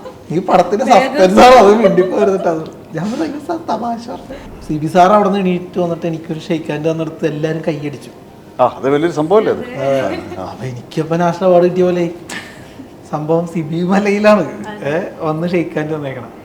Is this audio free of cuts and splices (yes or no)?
no